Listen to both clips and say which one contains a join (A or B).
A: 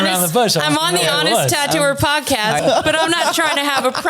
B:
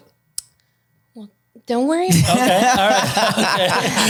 A